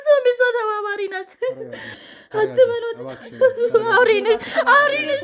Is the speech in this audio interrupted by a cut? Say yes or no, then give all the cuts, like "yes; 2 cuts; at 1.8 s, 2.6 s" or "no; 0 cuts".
yes; 1 cut; at 1.9 s